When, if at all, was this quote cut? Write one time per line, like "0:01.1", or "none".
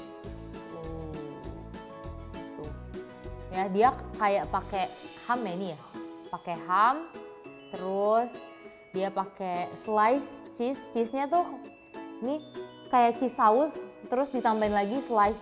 none